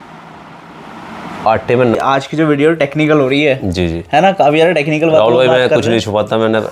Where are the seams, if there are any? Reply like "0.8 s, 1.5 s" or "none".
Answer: 2.0 s